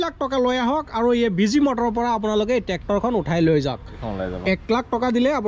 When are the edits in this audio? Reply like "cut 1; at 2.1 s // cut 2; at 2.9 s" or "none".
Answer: cut 1; at 4.0 s